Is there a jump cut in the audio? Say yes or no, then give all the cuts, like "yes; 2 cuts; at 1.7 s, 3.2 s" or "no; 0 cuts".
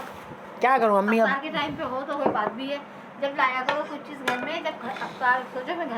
no; 0 cuts